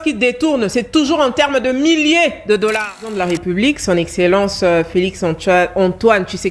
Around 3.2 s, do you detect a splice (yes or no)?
yes